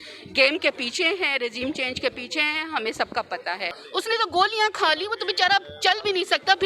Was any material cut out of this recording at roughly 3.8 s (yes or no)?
yes